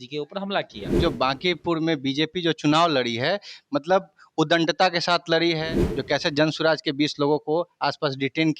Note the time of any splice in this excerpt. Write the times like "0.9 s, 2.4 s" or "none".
1.0 s, 5.7 s